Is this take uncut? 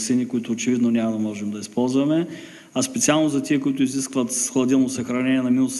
yes; 0 cuts

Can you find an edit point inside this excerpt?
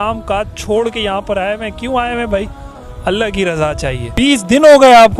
yes; 1 cut; at 4.1 s

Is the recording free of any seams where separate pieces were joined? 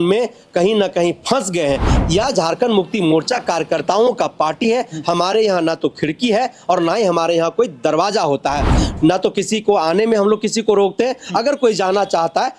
no; 1 cut; at 1.9 s

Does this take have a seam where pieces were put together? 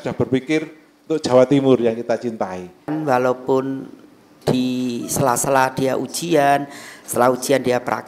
yes; 1 cut; at 2.9 s

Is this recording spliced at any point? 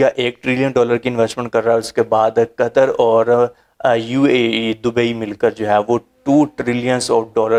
no; 0 cuts

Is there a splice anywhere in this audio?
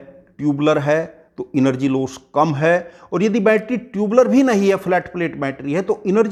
no; 0 cuts

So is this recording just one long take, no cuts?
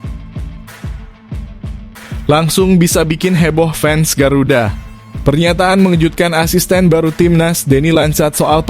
no; 1 cut; at 2.3 s

